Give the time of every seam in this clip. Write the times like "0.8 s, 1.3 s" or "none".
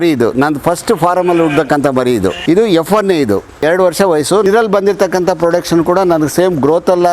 2.4 s, 3.6 s, 4.5 s